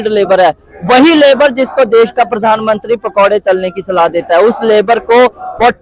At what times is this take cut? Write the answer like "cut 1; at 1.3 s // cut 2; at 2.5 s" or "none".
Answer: none